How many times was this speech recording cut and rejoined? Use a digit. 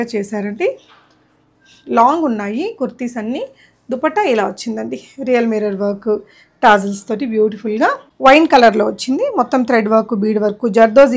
1